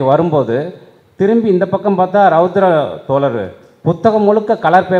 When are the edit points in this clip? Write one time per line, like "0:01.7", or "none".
none